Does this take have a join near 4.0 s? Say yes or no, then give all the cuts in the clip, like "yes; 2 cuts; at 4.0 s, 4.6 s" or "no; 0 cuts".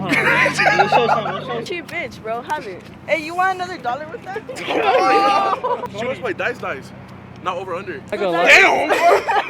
no; 3 cuts; at 1.6 s, 5.9 s, 8.1 s